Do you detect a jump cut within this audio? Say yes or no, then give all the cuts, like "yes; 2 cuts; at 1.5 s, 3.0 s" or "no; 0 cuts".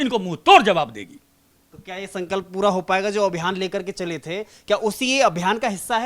no; 0 cuts